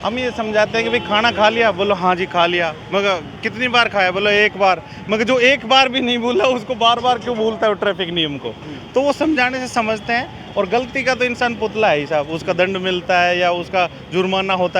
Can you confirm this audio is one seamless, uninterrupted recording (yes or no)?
yes